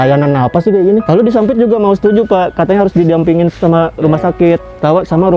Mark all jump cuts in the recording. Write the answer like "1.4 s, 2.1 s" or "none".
1.0 s